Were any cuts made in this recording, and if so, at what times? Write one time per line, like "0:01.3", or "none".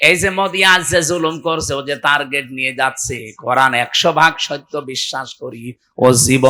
none